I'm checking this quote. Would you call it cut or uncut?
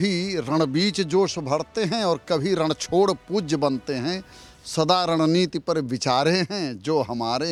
uncut